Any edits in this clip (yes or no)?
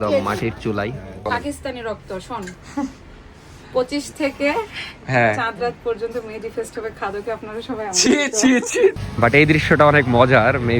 yes